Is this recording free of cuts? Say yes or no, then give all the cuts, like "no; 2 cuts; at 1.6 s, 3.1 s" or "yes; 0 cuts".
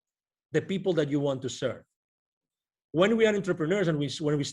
yes; 0 cuts